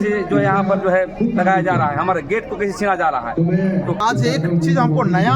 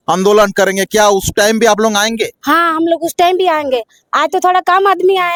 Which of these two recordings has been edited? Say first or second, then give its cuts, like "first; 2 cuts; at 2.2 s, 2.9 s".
first; 1 cut; at 4.0 s